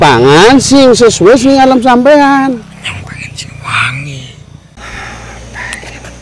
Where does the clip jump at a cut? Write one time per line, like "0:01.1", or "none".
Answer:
0:04.6